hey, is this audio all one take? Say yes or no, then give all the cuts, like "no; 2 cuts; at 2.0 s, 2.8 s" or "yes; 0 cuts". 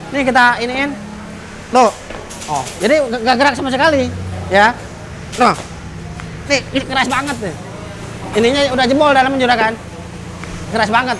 yes; 0 cuts